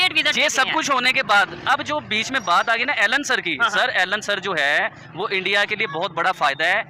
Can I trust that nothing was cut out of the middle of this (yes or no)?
yes